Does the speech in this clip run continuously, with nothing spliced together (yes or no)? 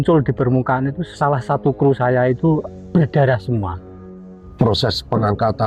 no